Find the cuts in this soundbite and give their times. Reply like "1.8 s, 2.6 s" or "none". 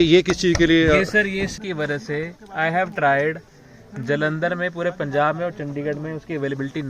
1.5 s